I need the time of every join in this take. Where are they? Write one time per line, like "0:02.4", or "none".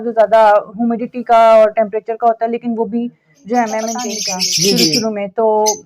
0:04.2